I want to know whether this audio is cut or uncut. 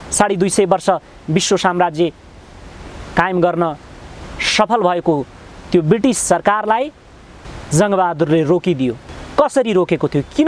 cut